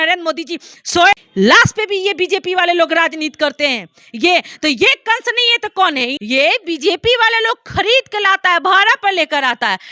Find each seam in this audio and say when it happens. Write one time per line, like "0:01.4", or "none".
0:01.2
0:06.2